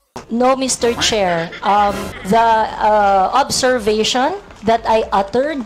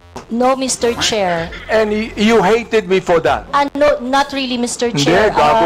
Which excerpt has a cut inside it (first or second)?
second